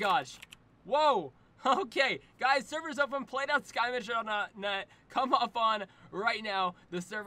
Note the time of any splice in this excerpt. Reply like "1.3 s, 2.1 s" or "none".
none

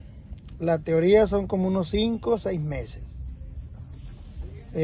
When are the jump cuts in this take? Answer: none

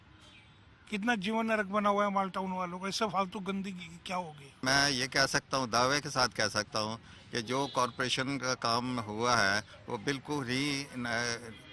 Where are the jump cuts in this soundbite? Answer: 4.6 s

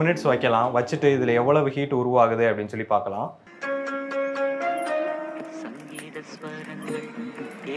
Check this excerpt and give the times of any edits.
none

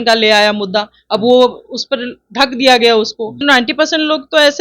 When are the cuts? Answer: 3.4 s

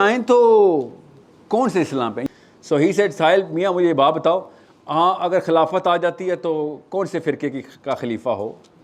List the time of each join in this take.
2.2 s

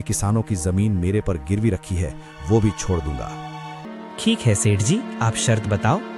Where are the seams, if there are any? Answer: 3.9 s

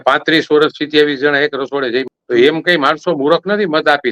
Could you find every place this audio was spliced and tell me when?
2.2 s

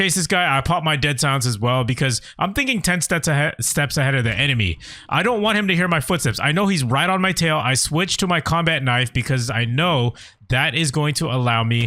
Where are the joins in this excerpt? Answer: none

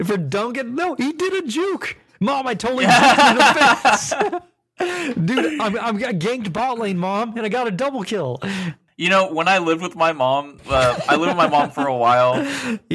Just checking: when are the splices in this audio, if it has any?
none

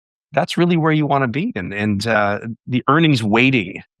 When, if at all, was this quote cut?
none

